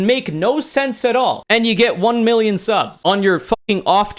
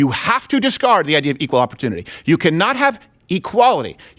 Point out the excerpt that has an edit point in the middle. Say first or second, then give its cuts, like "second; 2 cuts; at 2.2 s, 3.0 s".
first; 2 cuts; at 1.4 s, 2.9 s